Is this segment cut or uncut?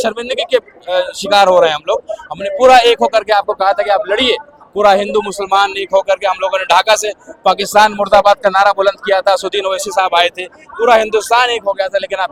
uncut